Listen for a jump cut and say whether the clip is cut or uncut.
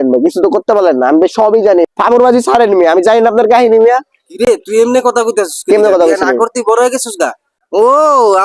uncut